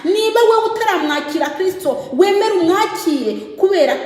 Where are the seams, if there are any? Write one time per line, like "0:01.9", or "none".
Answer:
none